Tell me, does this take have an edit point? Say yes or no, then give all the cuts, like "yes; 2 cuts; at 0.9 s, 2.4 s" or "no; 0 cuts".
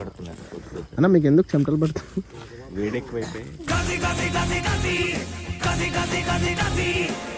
no; 0 cuts